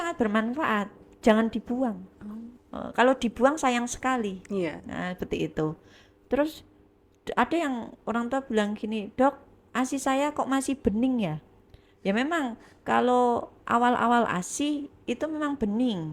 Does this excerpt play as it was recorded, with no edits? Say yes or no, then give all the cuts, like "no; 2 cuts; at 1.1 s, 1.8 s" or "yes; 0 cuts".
yes; 0 cuts